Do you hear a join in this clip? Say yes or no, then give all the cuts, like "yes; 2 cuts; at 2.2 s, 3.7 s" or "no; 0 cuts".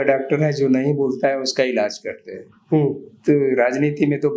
no; 0 cuts